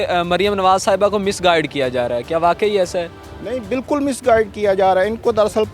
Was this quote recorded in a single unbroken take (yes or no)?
yes